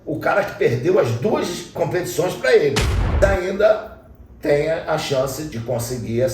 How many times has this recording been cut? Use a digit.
3